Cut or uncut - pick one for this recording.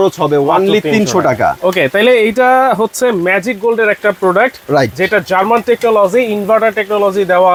uncut